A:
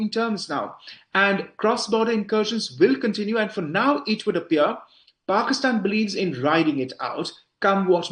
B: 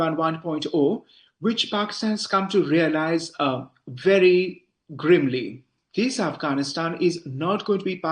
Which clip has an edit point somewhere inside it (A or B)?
B